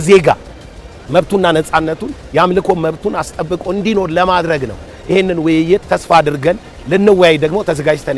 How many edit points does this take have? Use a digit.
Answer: 0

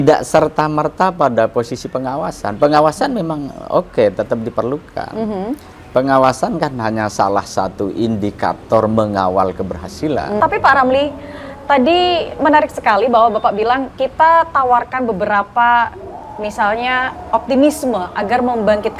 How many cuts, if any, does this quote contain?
1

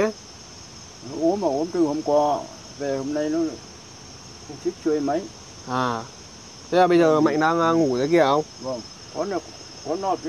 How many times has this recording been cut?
1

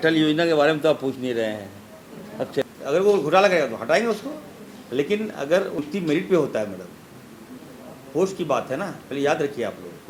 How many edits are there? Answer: 2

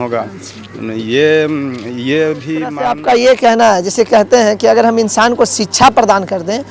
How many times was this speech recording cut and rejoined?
1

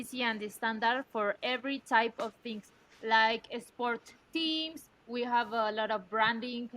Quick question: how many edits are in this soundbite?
1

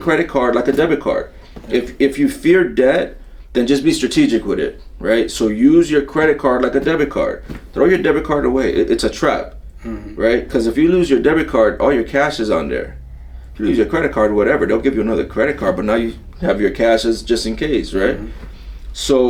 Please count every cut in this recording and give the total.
0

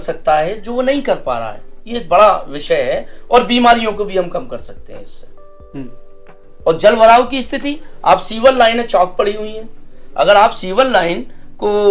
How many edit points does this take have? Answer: 0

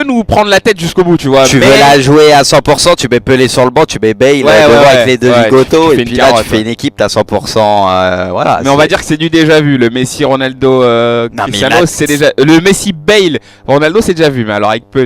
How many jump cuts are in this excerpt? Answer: 1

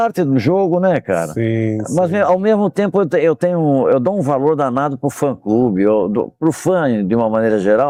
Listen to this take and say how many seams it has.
0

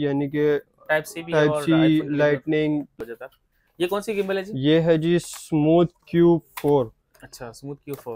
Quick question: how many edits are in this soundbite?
1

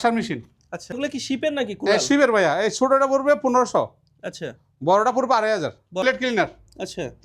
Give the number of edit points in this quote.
2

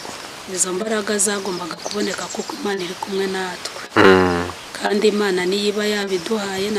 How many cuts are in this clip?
0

